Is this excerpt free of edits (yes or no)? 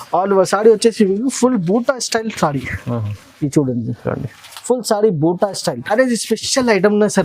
no